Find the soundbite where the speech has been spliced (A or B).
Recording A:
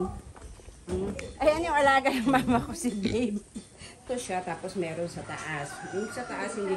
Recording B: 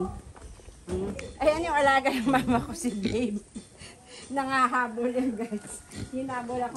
A